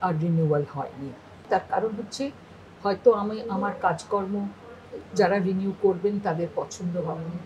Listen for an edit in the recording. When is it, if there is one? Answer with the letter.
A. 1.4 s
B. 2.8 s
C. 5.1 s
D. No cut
A